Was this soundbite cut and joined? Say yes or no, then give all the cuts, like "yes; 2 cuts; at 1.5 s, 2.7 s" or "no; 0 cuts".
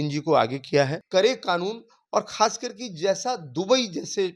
yes; 1 cut; at 1.0 s